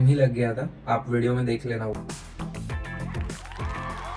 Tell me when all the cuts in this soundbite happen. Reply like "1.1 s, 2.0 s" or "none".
1.9 s